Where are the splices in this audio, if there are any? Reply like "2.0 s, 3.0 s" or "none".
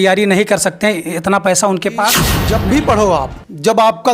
2.3 s

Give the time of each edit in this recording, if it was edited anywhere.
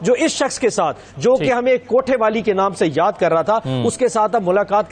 none

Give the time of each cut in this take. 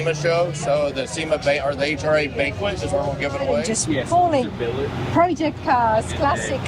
3.6 s

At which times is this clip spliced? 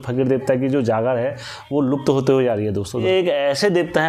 3.1 s

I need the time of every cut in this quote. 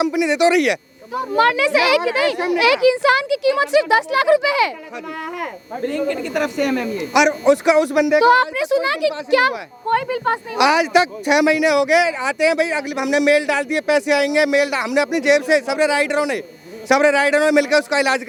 none

